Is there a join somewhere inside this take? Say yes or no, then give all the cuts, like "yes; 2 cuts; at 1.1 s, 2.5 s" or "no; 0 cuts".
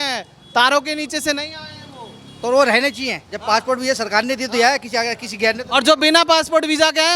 no; 0 cuts